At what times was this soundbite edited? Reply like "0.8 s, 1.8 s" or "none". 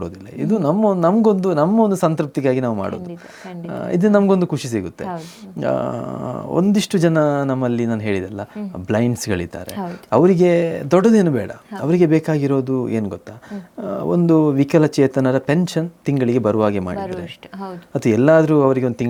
none